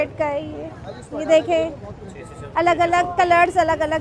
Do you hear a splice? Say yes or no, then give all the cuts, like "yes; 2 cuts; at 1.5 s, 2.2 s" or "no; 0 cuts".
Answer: no; 0 cuts